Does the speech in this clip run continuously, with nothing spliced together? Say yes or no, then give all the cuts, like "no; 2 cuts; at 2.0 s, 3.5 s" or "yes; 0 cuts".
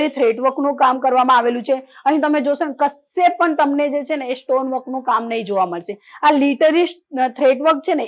yes; 0 cuts